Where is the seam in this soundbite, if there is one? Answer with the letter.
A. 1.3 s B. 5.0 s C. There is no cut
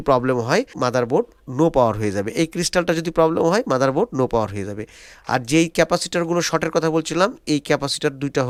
C